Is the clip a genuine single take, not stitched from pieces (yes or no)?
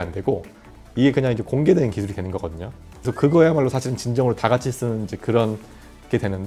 no